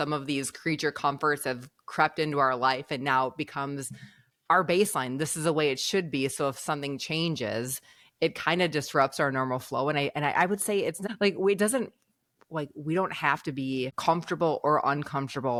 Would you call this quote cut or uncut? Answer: uncut